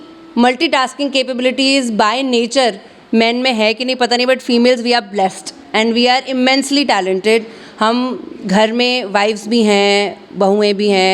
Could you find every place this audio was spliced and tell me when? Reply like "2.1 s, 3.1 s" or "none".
none